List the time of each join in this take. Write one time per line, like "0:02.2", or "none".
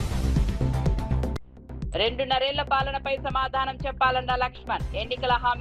none